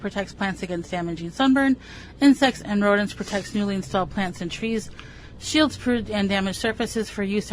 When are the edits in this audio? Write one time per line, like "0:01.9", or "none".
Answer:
none